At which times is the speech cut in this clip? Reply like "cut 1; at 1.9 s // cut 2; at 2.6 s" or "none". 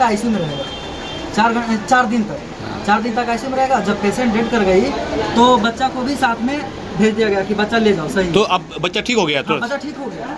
none